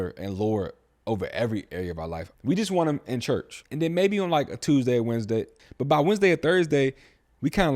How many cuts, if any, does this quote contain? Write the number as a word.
three